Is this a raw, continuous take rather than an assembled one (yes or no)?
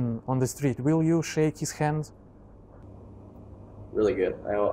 no